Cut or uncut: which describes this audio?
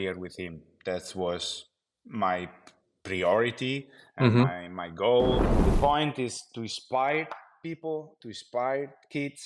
cut